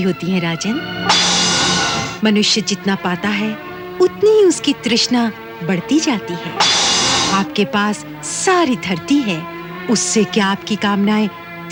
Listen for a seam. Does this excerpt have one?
no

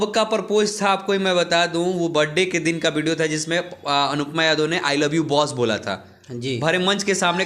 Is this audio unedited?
yes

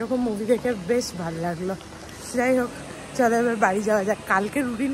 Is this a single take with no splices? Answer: yes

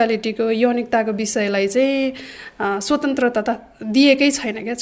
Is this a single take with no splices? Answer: yes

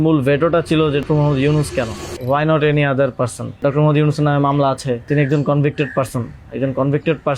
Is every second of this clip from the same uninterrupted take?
no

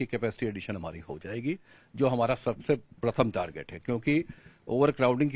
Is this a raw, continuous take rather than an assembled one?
yes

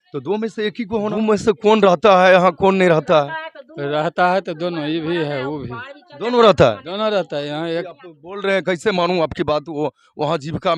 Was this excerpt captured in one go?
no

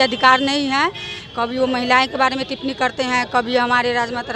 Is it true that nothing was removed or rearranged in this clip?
yes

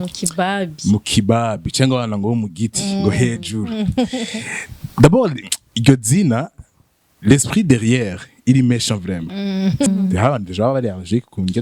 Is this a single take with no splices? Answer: no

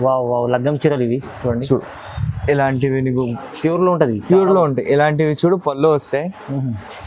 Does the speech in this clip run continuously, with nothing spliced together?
yes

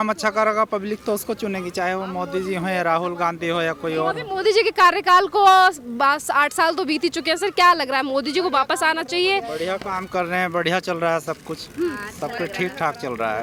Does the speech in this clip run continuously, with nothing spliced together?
yes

